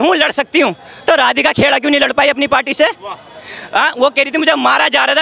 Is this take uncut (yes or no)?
yes